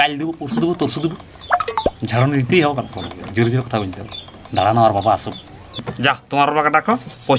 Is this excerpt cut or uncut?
cut